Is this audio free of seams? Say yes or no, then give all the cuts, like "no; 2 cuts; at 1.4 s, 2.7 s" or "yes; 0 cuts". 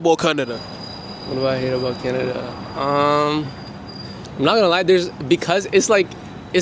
yes; 0 cuts